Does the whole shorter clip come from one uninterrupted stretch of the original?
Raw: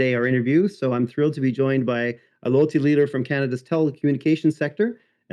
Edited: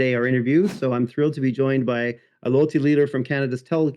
yes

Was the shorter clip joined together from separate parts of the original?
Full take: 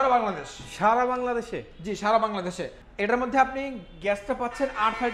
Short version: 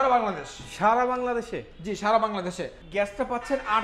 yes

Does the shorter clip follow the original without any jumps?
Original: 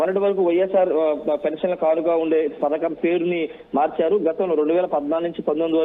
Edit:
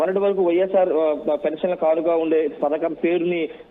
yes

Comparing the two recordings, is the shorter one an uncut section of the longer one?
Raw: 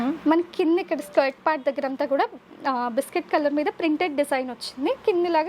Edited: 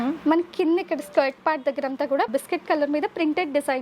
no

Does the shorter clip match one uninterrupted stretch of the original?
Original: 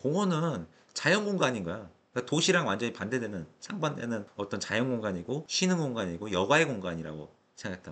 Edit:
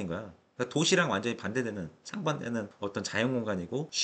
yes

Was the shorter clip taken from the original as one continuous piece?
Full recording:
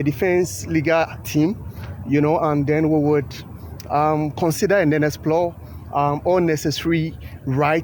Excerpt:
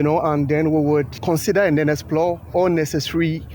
no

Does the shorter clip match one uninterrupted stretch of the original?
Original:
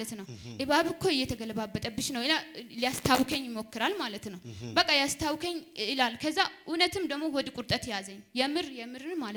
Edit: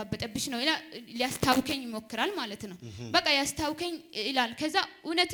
yes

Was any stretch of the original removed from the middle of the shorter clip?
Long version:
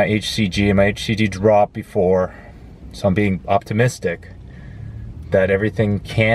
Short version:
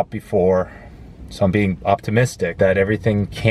yes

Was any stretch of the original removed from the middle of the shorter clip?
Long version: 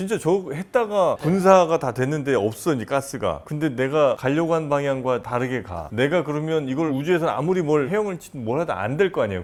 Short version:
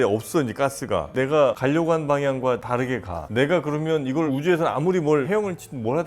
yes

